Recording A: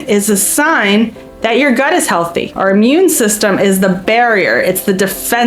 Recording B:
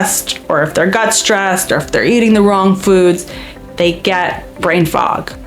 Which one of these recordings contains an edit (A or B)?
A